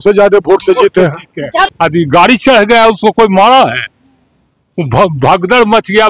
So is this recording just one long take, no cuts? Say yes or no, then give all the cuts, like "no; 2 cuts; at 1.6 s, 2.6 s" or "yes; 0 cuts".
no; 1 cut; at 1.7 s